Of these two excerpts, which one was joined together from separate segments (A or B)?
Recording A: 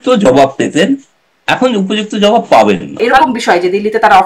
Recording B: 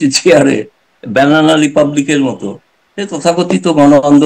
A